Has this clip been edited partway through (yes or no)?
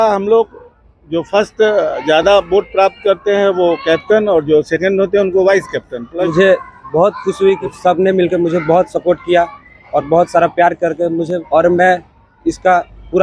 yes